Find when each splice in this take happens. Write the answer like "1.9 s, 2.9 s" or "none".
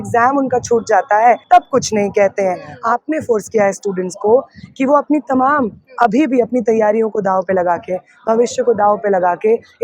1.4 s, 2.7 s